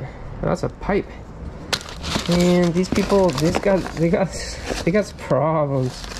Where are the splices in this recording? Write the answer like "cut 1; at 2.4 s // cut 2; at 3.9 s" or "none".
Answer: none